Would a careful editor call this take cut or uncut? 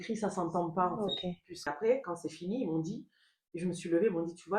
cut